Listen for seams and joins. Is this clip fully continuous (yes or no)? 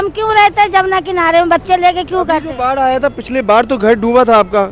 yes